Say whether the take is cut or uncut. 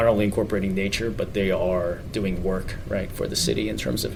uncut